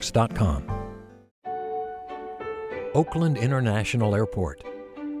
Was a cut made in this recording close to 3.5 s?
no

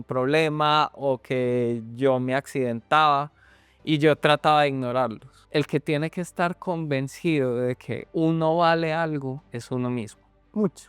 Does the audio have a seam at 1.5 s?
no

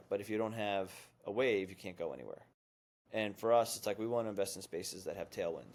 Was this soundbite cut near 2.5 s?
no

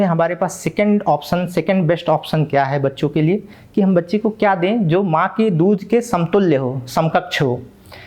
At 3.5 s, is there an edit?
no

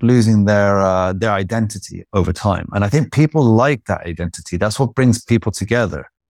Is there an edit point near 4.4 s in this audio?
no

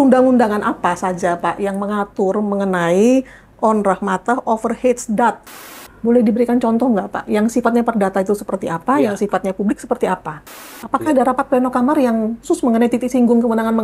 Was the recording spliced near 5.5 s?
yes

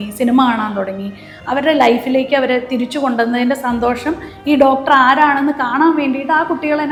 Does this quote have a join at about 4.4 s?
no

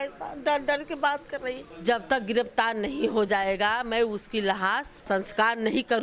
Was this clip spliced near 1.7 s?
yes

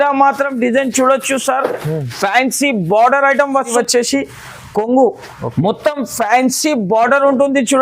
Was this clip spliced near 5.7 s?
no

